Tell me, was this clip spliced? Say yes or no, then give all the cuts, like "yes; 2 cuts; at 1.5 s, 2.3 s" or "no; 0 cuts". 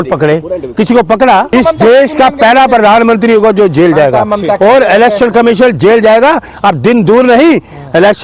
yes; 1 cut; at 1.5 s